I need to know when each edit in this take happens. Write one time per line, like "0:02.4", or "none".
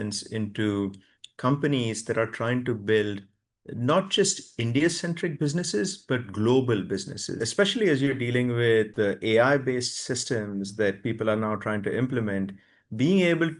0:07.4
0:08.9